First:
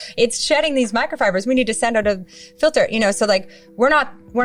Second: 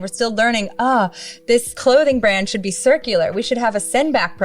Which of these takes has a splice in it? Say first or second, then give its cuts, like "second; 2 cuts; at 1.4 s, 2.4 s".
second; 1 cut; at 1.7 s